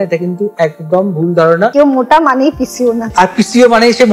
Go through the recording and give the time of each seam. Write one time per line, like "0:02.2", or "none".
0:01.7
0:03.1